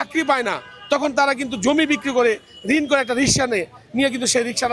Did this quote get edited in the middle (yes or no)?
no